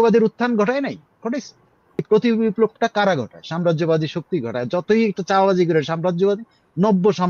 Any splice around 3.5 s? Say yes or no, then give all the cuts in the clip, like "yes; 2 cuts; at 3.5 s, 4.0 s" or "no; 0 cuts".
no; 1 cut; at 2.0 s